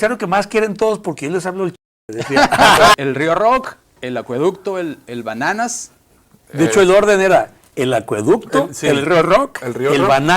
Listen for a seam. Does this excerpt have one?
yes; 1 cut; at 3.0 s

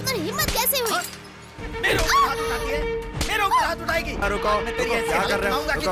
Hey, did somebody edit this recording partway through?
yes; 1 cut; at 4.2 s

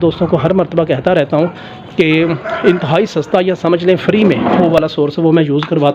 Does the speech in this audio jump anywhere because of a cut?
no; 0 cuts

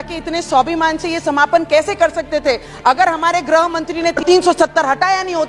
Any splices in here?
yes; 1 cut; at 4.2 s

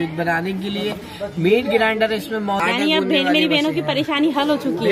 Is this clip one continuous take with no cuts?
no; 1 cut; at 2.6 s

